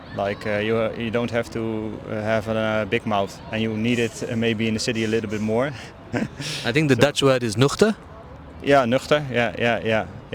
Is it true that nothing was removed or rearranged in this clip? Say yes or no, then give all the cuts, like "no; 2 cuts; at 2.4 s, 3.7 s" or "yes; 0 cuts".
yes; 0 cuts